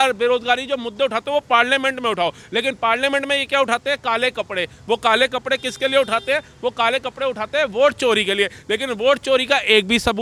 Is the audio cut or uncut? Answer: uncut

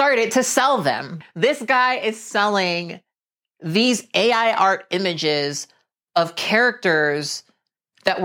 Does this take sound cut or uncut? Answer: cut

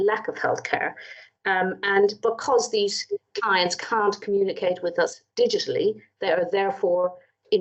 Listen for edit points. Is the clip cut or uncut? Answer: uncut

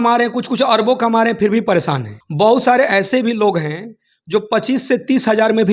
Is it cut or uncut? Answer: uncut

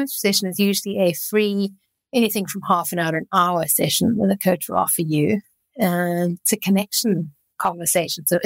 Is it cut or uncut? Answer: uncut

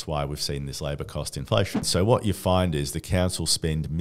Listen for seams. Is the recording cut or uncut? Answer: cut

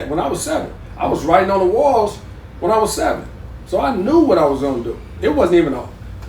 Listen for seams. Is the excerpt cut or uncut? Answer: uncut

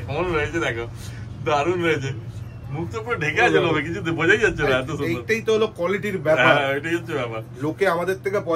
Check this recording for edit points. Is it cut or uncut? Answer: uncut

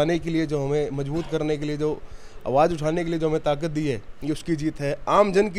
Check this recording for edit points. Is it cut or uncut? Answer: uncut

